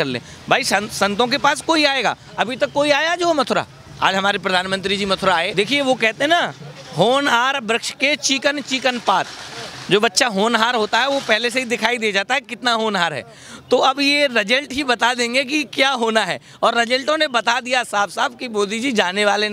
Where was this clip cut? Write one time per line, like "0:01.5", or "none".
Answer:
0:05.5